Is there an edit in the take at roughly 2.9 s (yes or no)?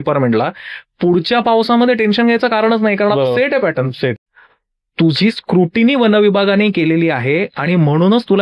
no